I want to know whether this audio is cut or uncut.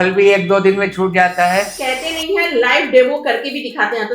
cut